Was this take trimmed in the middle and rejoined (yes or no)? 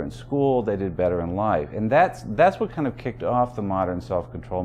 no